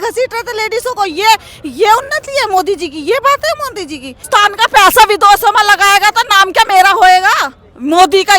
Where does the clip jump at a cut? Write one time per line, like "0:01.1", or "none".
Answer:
0:04.2